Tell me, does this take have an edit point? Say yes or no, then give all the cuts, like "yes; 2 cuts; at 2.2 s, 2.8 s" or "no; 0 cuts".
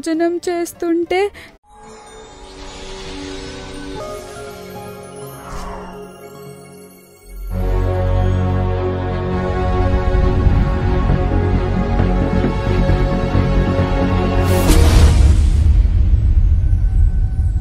no; 0 cuts